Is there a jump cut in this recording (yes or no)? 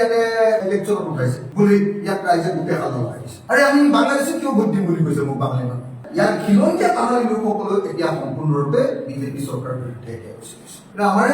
yes